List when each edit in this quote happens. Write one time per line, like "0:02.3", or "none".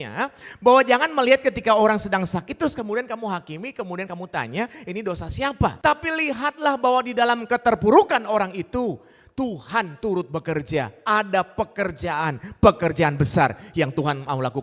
0:05.8